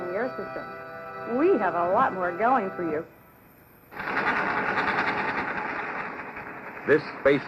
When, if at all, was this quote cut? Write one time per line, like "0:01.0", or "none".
0:04.1